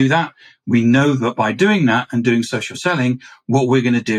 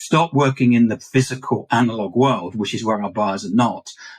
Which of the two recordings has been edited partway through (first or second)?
second